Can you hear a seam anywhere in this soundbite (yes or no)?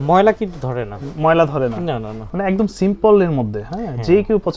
yes